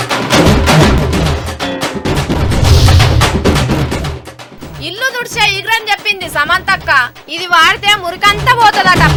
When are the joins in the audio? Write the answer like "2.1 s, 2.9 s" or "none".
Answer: none